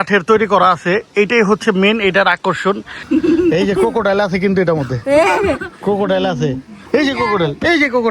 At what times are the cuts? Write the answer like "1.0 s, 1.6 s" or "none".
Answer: 3.0 s